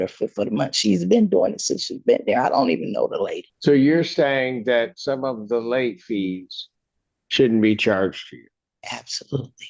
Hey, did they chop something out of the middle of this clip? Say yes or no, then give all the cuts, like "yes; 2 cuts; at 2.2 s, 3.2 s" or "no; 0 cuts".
yes; 1 cut; at 3.5 s